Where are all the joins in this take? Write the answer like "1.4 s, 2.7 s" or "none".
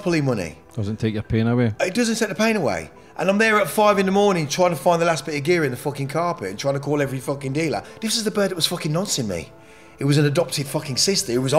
7.9 s